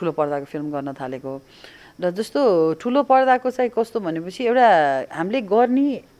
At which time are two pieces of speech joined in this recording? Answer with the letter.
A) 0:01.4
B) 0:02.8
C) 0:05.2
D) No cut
D